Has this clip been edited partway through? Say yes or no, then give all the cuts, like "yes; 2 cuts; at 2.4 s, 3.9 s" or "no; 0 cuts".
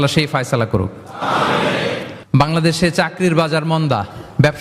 yes; 1 cut; at 2.1 s